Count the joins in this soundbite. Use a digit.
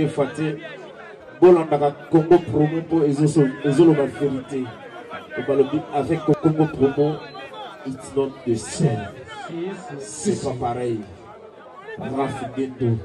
0